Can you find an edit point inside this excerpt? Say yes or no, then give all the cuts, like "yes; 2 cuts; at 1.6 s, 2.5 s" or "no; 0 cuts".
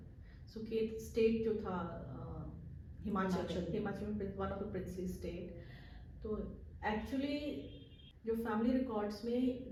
no; 0 cuts